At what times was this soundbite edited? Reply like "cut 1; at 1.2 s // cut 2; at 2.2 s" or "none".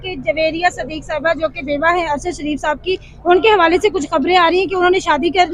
none